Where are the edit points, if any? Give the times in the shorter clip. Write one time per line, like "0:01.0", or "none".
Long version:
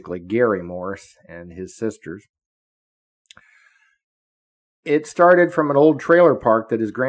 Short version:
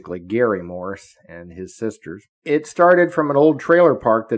0:02.3